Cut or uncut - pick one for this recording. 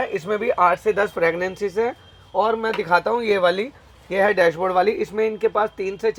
uncut